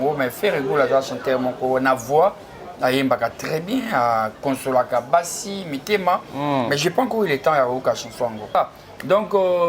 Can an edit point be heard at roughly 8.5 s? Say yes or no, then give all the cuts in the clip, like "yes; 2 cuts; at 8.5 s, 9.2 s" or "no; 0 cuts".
yes; 1 cut; at 8.5 s